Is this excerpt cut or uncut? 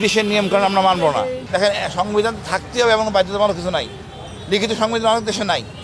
cut